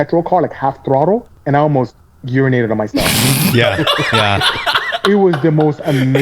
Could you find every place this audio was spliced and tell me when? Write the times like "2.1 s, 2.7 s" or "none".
1.3 s